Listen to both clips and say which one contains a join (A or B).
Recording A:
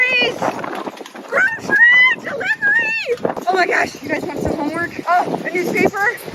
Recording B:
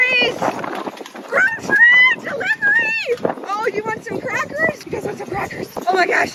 A